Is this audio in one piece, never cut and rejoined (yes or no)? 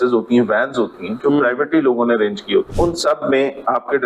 no